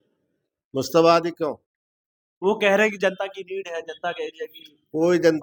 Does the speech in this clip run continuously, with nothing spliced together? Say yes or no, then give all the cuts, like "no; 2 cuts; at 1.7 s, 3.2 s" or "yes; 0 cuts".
yes; 0 cuts